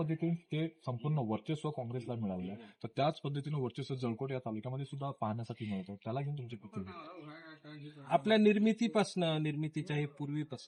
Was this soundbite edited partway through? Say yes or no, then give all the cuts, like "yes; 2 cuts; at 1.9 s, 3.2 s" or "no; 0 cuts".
no; 0 cuts